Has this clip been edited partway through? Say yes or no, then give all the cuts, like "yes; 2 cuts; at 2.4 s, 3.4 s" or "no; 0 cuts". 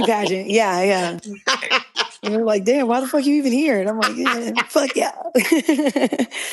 yes; 1 cut; at 1.1 s